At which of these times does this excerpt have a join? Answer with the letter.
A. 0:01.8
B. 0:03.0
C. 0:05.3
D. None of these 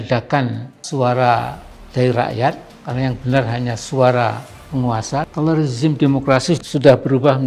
C